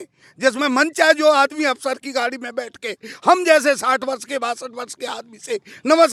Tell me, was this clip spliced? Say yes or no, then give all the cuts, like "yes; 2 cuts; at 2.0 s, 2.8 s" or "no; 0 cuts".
no; 0 cuts